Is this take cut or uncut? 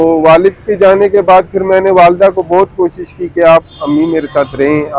uncut